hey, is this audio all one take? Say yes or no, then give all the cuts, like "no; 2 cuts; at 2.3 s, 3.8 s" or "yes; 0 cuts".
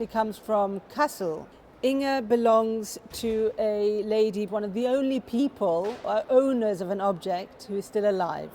no; 2 cuts; at 1.5 s, 4.5 s